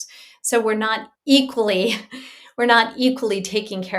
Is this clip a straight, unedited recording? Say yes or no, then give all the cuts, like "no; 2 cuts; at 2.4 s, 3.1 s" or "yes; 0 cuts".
no; 1 cut; at 1.1 s